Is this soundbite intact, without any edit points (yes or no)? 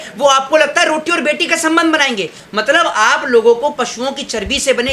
no